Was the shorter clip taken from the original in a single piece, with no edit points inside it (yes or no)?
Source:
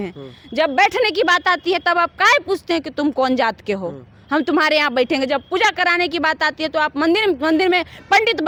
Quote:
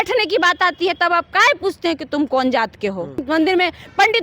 no